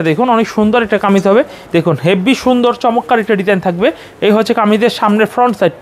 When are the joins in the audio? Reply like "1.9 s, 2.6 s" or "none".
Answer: 1.6 s